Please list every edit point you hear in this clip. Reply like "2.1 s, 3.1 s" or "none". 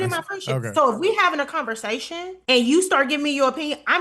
2.3 s